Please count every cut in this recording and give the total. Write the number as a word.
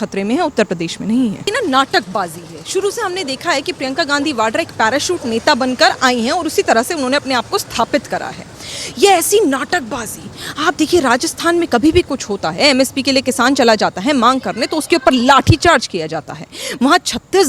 one